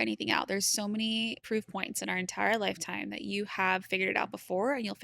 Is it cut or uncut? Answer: cut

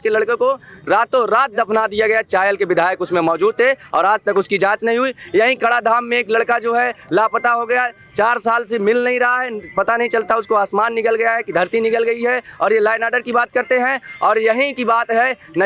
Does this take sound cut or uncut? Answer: uncut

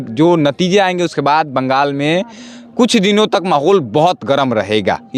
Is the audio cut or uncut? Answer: uncut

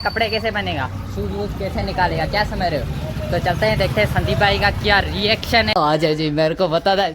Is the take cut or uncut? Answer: cut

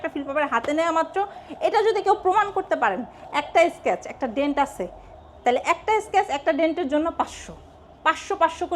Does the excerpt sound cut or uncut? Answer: uncut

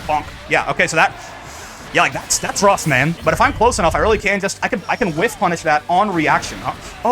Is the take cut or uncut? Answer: cut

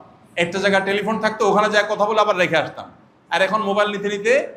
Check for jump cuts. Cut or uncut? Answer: uncut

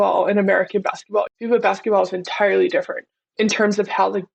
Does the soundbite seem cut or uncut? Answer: cut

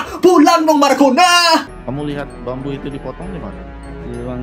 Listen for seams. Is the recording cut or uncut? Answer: cut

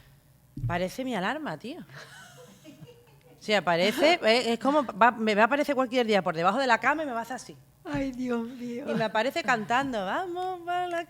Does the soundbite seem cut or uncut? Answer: uncut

